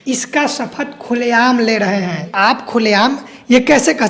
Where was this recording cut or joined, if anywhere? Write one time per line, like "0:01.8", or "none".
0:02.3